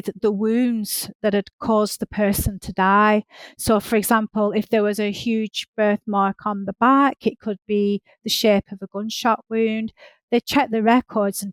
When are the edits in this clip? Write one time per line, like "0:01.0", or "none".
none